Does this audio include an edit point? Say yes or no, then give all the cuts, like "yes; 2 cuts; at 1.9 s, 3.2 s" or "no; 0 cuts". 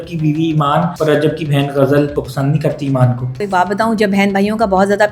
yes; 3 cuts; at 0.9 s, 2.2 s, 3.3 s